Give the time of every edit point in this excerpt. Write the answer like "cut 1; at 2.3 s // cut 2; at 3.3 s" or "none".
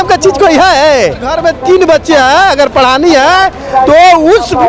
cut 1; at 1.3 s